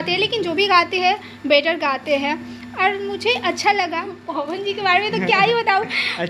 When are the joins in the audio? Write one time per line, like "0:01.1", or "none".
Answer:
0:04.3

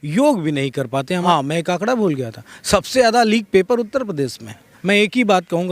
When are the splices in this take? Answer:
0:01.2
0:04.7

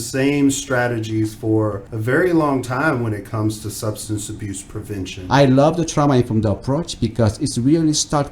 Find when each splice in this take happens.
0:01.9
0:05.2

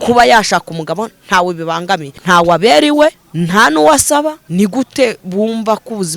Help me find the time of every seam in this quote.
0:02.2
0:03.2
0:04.4

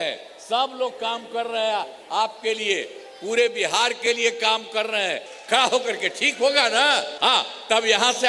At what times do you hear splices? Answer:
0:05.3
0:07.1

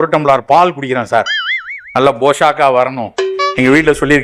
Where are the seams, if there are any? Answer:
none

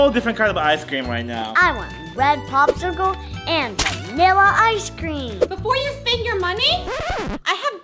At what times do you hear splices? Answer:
0:01.5
0:05.4

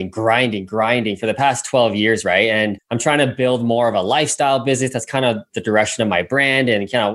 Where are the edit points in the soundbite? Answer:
0:02.8

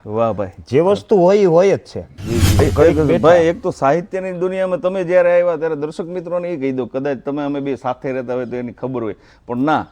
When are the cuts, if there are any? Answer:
0:02.6

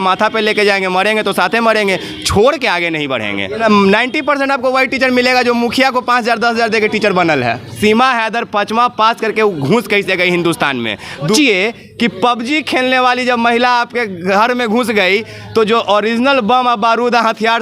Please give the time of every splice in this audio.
0:03.6
0:07.8
0:11.4

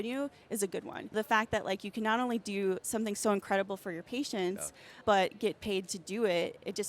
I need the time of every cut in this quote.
0:01.1
0:04.9

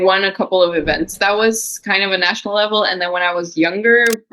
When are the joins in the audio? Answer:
0:01.1

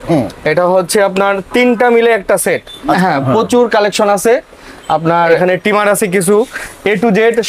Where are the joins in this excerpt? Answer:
0:02.9
0:05.4

